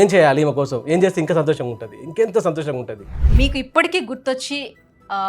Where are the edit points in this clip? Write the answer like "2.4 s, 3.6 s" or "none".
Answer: 3.2 s